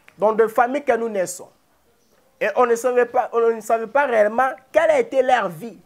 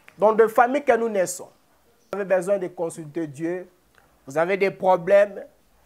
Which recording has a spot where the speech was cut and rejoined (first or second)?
second